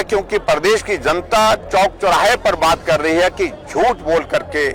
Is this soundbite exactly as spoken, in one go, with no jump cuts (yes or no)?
yes